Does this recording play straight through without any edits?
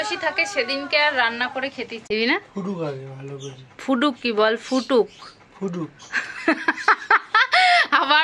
no; 1 cut; at 2.0 s

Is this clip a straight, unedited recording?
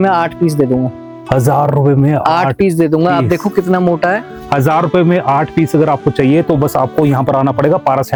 yes; 0 cuts

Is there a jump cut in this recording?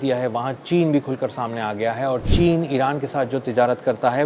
yes; 1 cut; at 2.3 s

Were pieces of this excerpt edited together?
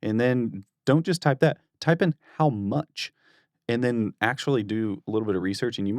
no; 0 cuts

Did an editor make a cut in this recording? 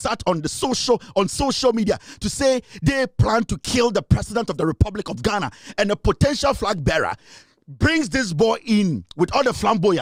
no; 0 cuts

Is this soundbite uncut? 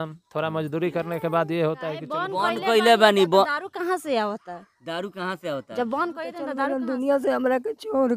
no; 2 cuts; at 2.2 s, 6.5 s

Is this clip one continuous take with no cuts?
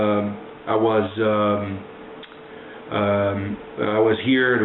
no; 1 cut; at 1.2 s

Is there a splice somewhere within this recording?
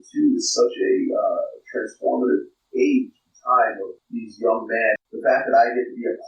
yes; 3 cuts; at 2.6 s, 3.9 s, 5.0 s

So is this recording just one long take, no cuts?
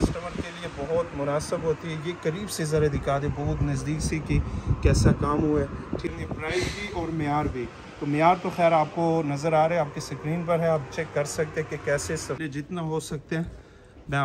no; 2 cuts; at 6.1 s, 12.4 s

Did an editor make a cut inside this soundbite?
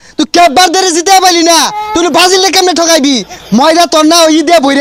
no; 0 cuts

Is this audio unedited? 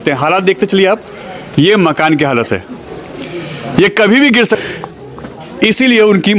no; 1 cut; at 4.6 s

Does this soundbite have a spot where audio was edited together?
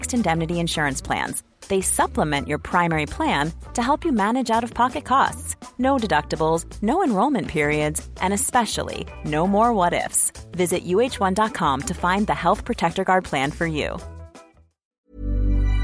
yes; 1 cut; at 14.9 s

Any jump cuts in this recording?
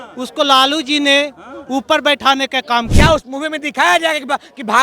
yes; 1 cut; at 2.9 s

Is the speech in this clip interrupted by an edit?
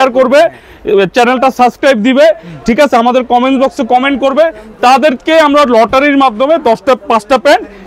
no; 0 cuts

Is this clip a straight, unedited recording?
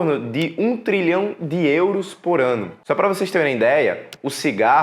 no; 1 cut; at 2.7 s

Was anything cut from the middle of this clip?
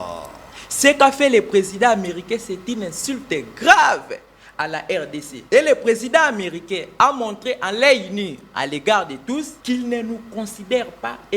yes; 2 cuts; at 5.3 s, 9.5 s

